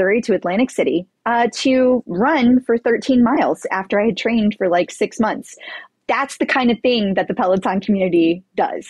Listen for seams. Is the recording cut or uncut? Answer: cut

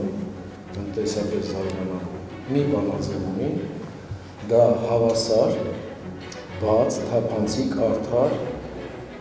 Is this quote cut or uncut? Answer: uncut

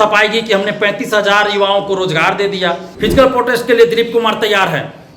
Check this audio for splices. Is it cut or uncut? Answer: cut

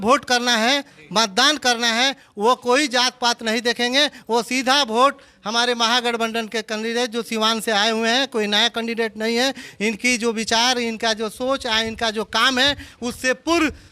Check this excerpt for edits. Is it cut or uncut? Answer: uncut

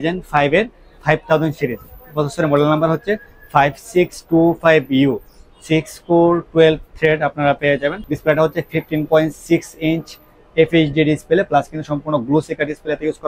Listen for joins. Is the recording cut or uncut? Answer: uncut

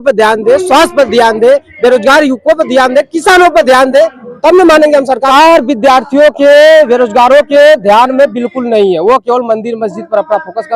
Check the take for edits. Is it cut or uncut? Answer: cut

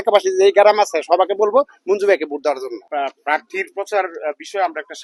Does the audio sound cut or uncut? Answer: cut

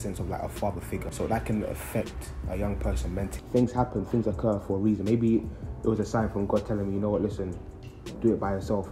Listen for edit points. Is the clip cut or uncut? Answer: cut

